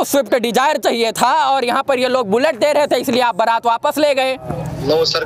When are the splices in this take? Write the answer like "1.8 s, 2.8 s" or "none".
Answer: none